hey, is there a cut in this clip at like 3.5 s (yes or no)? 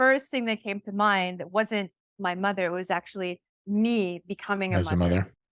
yes